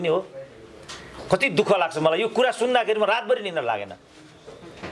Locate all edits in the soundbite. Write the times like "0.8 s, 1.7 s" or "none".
none